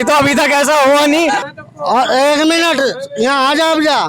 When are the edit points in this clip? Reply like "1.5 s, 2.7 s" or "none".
1.4 s